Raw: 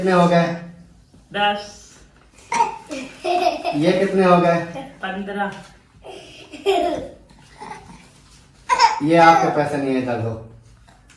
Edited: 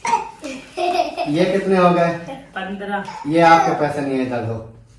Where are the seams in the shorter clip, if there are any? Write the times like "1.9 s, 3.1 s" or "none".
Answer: 3.2 s